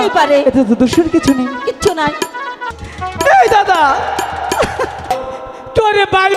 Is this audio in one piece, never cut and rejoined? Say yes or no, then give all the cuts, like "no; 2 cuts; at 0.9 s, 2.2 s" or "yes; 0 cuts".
no; 2 cuts; at 2.6 s, 5.0 s